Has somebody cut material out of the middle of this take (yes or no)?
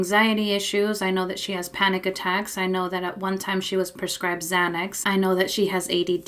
yes